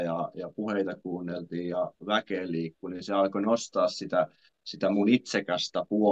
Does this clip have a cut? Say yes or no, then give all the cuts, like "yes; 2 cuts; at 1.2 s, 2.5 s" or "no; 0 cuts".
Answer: no; 0 cuts